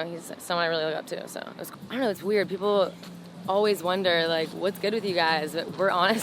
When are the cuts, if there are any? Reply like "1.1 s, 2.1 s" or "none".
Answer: 1.6 s